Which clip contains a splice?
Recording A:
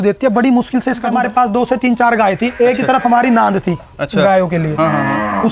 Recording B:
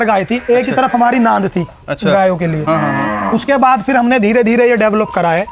A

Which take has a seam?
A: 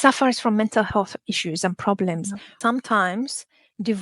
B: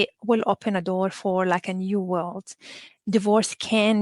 A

